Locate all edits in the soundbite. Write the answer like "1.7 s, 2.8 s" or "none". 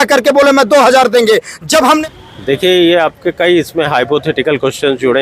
2.0 s